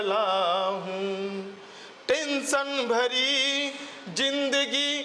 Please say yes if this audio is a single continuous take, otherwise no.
yes